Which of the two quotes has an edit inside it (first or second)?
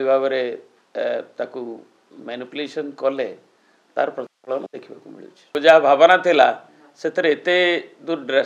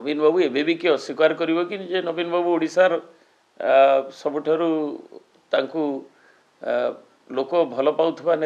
first